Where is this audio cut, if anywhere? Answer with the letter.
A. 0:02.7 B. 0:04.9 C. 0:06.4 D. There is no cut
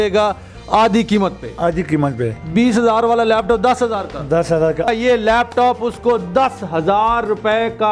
B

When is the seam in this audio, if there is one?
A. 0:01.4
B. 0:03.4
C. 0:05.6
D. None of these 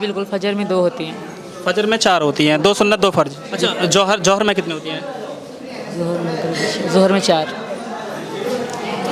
B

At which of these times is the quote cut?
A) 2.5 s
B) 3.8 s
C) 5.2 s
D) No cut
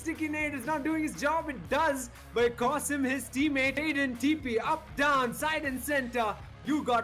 B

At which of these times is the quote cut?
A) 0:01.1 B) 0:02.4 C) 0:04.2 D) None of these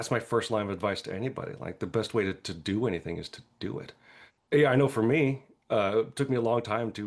D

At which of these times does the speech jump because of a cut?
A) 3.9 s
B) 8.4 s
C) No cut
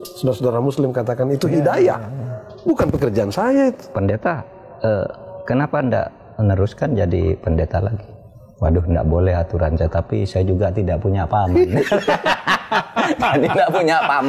A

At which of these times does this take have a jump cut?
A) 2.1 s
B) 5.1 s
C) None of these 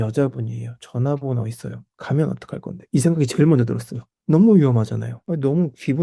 B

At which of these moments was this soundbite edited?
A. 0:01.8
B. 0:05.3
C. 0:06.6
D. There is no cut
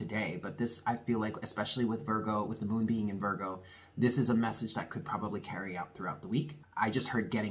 C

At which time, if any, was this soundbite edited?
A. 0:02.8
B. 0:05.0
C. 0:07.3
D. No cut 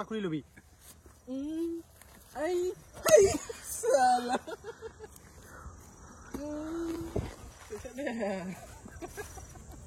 D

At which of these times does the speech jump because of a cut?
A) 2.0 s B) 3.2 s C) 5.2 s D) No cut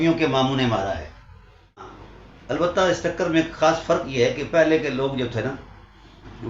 A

